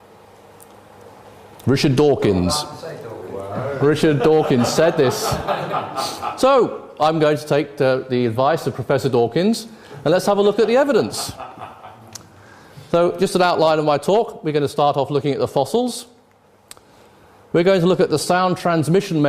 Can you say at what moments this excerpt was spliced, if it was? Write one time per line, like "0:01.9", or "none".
0:10.4